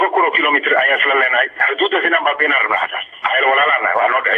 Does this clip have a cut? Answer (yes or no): no